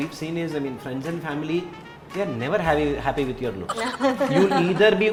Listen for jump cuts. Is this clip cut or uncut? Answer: uncut